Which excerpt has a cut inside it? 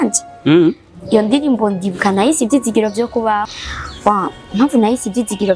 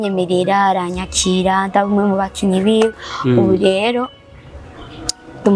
first; 1 cut; at 3.6 s

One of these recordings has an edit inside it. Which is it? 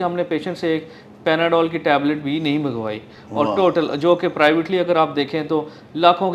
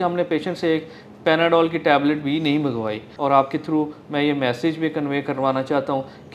second; 1 cut; at 3.0 s

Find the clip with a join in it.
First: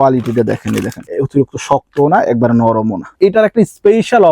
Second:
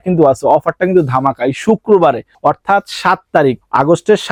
first; 2 cuts; at 1.1 s, 3.1 s

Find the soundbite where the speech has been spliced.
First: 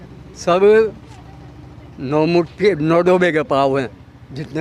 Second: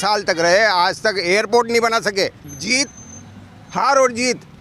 second; 1 cut; at 2.5 s

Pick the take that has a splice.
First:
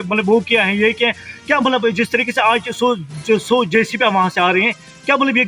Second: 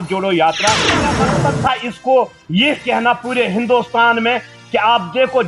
second; 1 cut; at 1.1 s

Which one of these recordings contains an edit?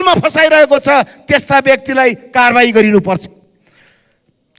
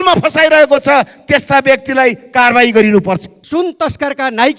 second; 1 cut; at 3.4 s

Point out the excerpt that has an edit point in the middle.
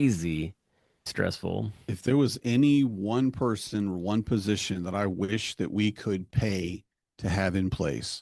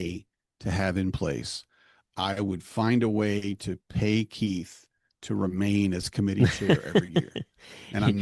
first; 1 cut; at 1.1 s

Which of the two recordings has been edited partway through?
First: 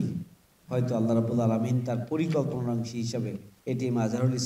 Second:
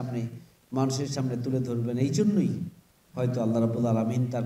first; 1 cut; at 3.5 s

